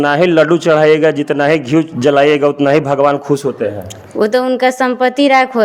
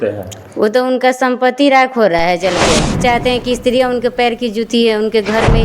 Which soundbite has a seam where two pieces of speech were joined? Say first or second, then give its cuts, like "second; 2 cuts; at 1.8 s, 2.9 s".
second; 1 cut; at 3.0 s